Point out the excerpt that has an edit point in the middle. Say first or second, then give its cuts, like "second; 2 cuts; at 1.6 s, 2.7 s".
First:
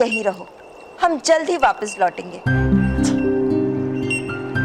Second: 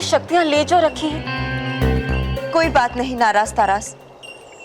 second; 1 cut; at 1.2 s